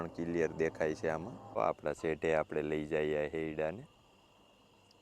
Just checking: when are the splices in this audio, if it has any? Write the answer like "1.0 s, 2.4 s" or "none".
1.6 s